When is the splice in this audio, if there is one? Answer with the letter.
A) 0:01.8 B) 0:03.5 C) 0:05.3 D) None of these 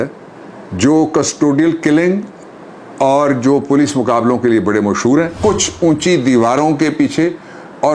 C